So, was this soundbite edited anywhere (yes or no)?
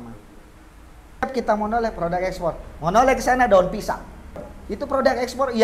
yes